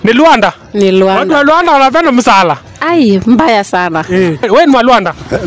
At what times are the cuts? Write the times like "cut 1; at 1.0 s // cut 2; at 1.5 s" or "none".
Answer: cut 1; at 4.5 s